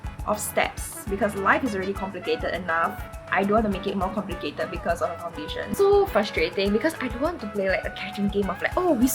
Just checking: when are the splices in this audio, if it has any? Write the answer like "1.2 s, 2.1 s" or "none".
5.8 s